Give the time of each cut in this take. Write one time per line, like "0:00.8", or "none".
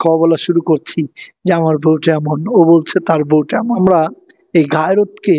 0:03.8